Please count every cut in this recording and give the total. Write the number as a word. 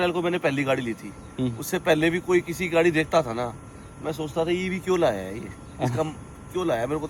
zero